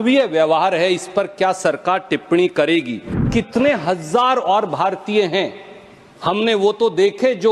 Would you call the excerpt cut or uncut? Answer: cut